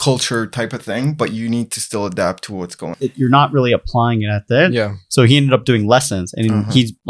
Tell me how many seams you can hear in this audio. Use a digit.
1